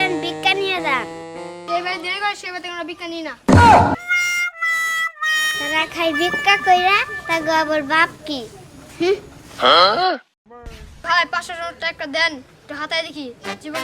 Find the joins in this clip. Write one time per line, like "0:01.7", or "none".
0:11.0